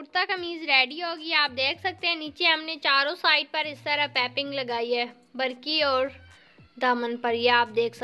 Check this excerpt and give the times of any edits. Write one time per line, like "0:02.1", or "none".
none